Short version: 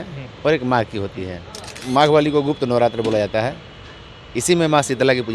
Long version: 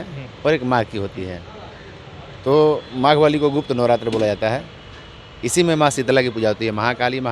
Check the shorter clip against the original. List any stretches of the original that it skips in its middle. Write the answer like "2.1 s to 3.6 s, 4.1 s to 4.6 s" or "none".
1.8 s to 2.9 s